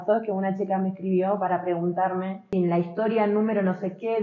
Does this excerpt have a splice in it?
yes; 1 cut; at 2.4 s

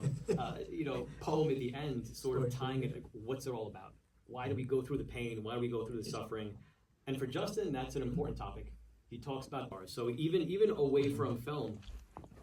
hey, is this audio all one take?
no; 1 cut; at 9.7 s

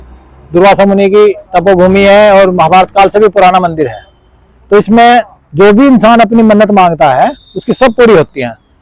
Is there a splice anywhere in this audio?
no; 0 cuts

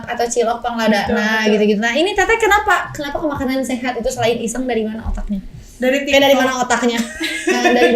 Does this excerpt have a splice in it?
no; 0 cuts

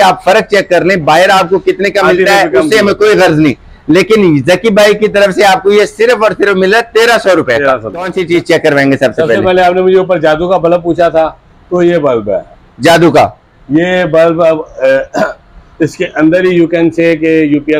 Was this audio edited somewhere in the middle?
yes; 1 cut; at 8.2 s

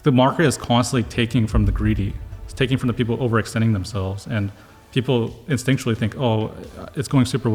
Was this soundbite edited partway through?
no; 0 cuts

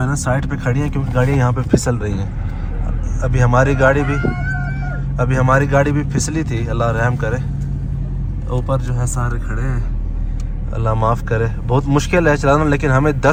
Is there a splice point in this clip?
no; 0 cuts

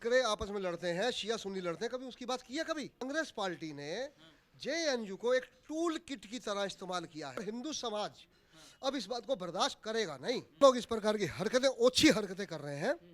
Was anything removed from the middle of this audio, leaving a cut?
yes; 3 cuts; at 3.0 s, 7.4 s, 10.6 s

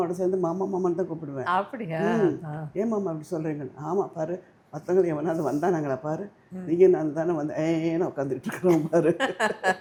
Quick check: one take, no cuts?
yes; 0 cuts

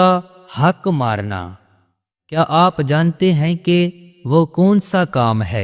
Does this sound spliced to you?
yes; 1 cut; at 2.4 s

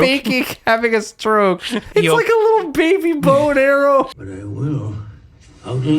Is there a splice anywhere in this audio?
yes; 1 cut; at 1.8 s

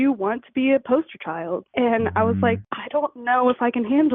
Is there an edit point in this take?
yes; 2 cuts; at 1.6 s, 2.7 s

